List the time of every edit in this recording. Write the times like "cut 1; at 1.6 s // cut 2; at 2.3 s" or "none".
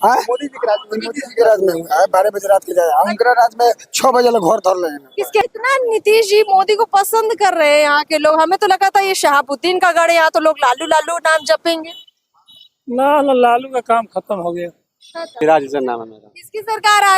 cut 1; at 5.4 s // cut 2; at 15.3 s